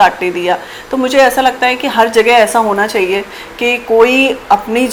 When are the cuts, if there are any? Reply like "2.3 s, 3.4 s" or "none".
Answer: none